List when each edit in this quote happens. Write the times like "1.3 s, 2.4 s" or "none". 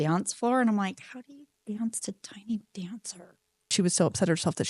3.6 s

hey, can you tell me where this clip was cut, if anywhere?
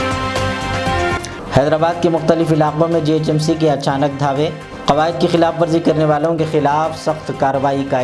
1.3 s

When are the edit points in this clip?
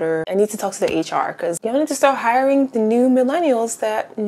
1.6 s

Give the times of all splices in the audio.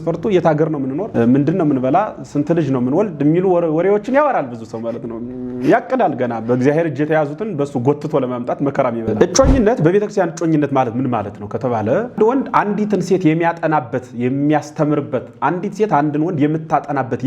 1.0 s, 9.1 s, 12.2 s

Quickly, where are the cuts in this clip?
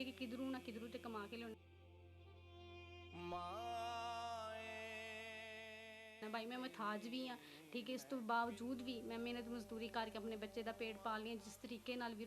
none

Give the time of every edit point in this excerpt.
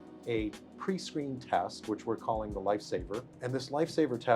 3.4 s

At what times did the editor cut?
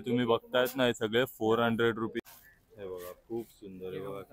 2.2 s

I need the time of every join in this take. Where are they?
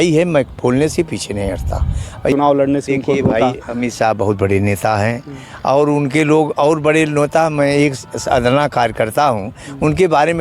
2.3 s

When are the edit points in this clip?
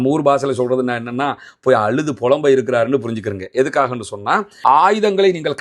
4.5 s

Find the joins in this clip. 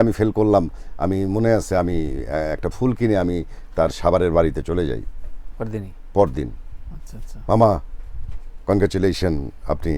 none

